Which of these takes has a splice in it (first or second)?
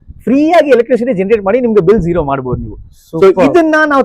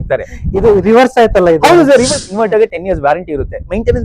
second